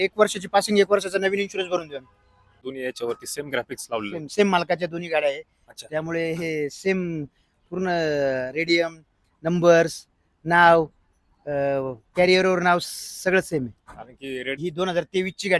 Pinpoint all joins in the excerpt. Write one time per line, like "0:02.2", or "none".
0:02.6
0:14.6